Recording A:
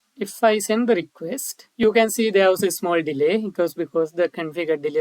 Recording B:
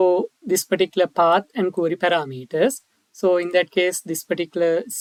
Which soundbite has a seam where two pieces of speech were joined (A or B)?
A